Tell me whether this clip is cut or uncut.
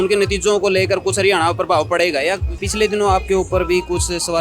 cut